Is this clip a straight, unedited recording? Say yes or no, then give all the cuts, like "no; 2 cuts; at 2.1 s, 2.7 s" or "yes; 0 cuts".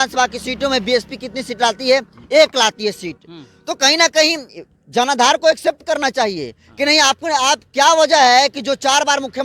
yes; 0 cuts